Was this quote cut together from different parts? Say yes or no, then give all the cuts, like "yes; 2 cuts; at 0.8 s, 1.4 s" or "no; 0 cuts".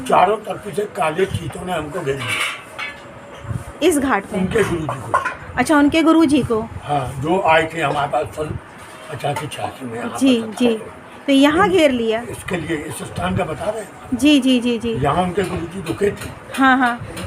no; 0 cuts